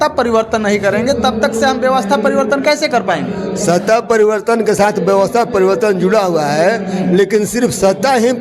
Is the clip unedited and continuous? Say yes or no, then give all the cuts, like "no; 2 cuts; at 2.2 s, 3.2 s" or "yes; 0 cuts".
yes; 0 cuts